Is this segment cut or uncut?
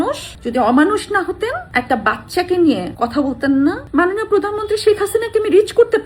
cut